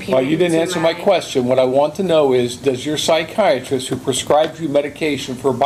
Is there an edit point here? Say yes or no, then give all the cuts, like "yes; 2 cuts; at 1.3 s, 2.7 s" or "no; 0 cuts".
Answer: no; 0 cuts